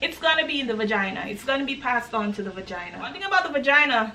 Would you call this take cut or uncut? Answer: cut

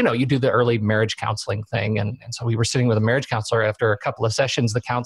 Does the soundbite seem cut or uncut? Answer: uncut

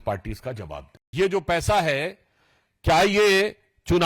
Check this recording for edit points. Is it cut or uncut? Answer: cut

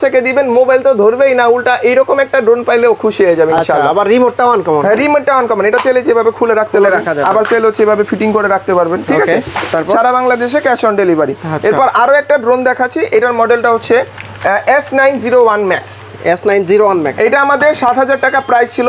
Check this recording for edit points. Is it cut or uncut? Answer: uncut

